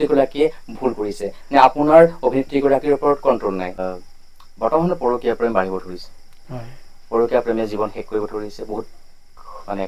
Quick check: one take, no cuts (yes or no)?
no